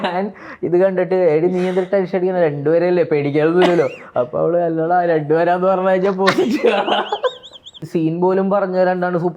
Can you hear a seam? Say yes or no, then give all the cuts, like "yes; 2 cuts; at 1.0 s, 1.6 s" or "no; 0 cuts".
yes; 1 cut; at 7.8 s